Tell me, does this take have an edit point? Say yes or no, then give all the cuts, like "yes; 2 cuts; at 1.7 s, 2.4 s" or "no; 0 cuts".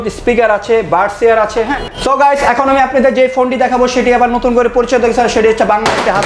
yes; 1 cut; at 1.9 s